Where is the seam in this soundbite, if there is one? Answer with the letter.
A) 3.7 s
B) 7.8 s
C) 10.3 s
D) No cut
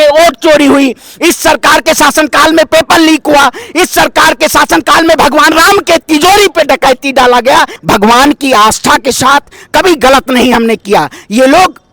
B